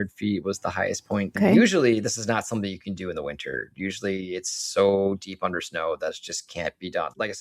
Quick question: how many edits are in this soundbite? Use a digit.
1